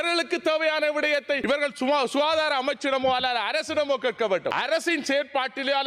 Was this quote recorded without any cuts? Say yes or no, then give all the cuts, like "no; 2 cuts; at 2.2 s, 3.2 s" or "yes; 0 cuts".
no; 2 cuts; at 1.4 s, 4.5 s